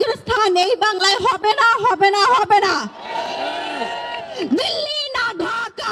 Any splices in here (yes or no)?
no